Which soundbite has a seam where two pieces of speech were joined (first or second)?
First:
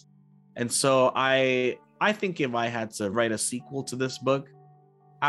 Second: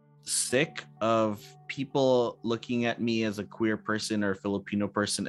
first